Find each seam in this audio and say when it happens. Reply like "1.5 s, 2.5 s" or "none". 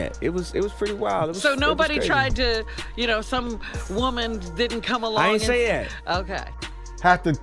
6.5 s

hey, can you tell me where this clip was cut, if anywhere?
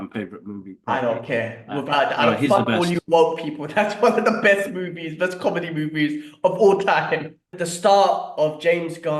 7.5 s

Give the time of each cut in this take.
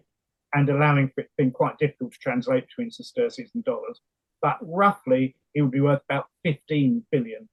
none

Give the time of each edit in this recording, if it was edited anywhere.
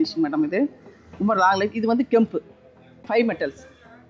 3.1 s

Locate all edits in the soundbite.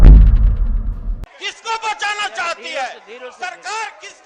1.1 s

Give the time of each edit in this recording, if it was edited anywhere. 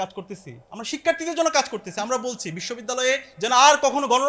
3.3 s

